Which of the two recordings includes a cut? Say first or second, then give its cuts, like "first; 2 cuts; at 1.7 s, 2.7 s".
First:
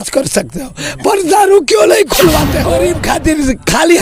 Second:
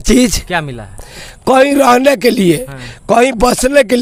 first; 1 cut; at 2.6 s